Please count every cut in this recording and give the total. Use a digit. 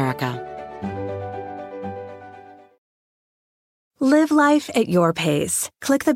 1